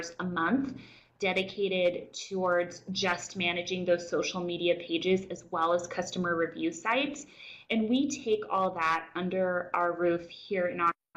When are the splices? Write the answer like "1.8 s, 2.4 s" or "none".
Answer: none